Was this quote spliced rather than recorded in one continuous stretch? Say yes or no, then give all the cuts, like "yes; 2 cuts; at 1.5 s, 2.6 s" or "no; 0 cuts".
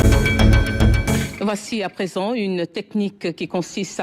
yes; 1 cut; at 1.3 s